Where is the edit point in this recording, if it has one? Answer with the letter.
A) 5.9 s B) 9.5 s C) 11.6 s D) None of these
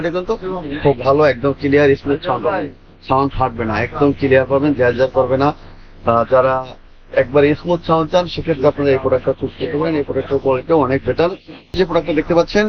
C